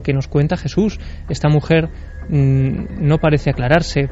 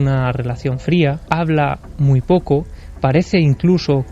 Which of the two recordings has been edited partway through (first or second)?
second